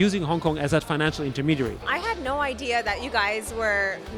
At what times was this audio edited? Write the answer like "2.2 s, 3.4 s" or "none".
1.9 s